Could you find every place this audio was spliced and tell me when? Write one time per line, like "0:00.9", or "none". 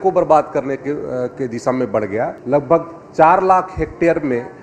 0:02.4

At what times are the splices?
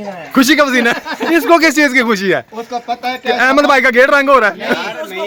none

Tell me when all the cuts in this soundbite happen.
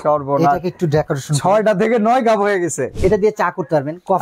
0:02.9

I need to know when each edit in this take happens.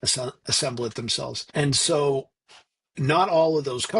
0:01.4

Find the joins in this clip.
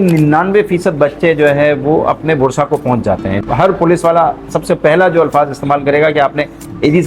0:03.4

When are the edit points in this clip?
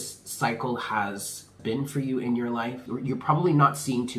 0:01.5
0:02.9

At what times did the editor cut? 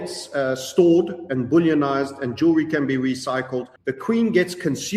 0:03.8

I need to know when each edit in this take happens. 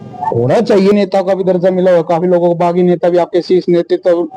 0:00.9

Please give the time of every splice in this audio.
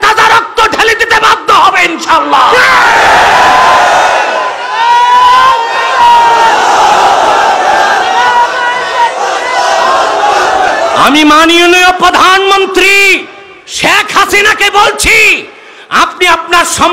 none

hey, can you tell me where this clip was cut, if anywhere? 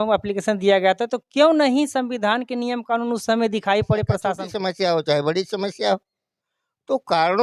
0:04.4

